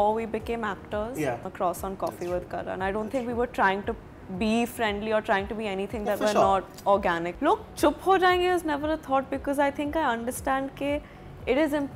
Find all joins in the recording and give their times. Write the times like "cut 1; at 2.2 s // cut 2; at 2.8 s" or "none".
cut 1; at 1.5 s // cut 2; at 7.3 s